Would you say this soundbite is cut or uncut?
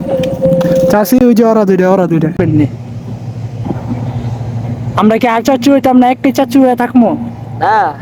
cut